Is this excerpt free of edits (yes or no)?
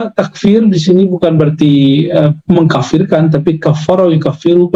yes